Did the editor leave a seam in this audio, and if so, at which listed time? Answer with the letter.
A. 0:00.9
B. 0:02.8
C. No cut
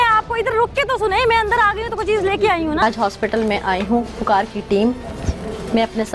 B